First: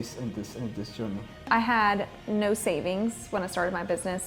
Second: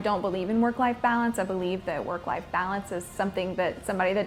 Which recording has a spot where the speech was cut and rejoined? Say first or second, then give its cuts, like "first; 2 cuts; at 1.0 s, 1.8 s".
first; 1 cut; at 1.5 s